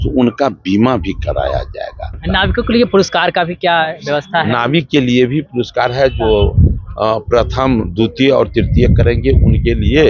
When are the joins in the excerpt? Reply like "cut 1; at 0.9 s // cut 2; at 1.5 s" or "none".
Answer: cut 1; at 2.1 s